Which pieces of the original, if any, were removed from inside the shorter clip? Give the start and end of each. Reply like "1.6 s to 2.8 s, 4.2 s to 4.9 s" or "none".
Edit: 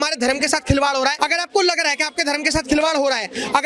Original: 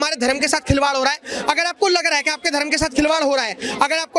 1.2 s to 1.4 s